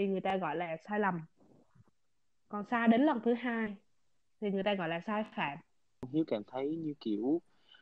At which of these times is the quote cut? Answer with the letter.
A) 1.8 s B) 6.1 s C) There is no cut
B